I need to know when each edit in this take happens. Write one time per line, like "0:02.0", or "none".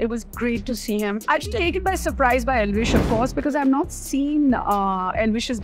0:01.2